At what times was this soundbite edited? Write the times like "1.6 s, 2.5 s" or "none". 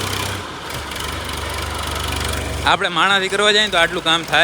none